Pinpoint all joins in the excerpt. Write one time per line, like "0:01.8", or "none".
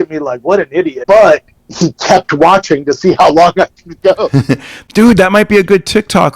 0:01.0
0:04.7